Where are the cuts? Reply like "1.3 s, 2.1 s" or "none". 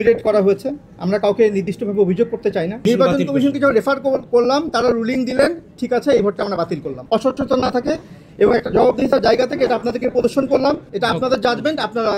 2.8 s, 6.9 s, 10.9 s

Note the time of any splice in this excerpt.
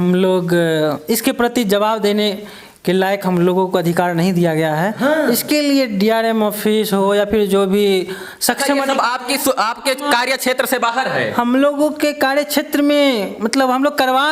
none

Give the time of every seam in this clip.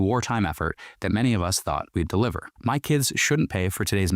2.5 s

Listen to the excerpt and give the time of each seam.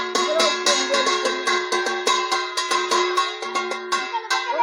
none

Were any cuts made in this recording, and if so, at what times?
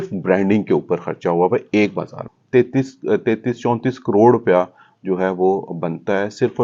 2.3 s

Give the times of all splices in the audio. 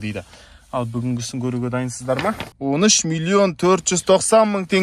2.5 s

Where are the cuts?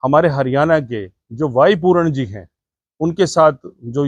none

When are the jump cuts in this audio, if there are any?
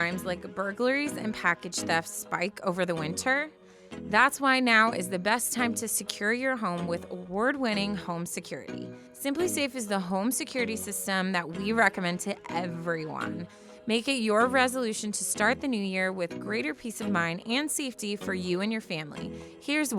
none

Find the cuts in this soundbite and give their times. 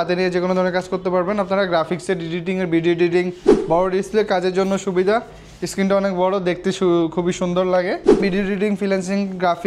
3.5 s, 8.2 s

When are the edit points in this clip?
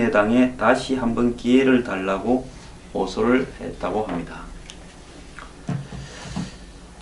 3.1 s

